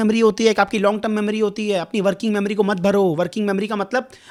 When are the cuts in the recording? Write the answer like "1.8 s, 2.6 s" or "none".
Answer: none